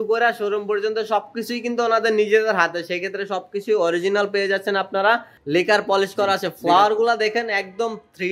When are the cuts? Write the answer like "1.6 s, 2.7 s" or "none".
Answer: 5.3 s